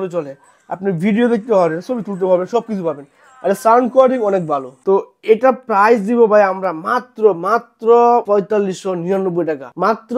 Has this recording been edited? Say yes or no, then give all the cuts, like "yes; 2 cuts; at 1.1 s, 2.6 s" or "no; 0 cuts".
no; 0 cuts